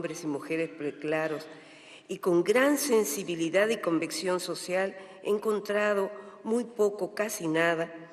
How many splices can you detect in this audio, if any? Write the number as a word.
one